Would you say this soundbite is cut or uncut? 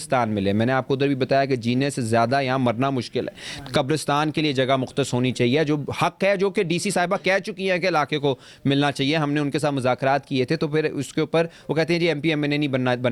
uncut